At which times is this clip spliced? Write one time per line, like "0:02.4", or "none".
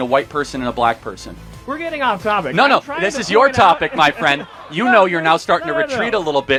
none